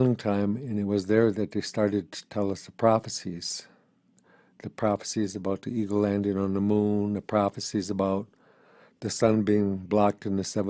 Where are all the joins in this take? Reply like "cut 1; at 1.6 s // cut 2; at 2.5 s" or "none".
cut 1; at 8.0 s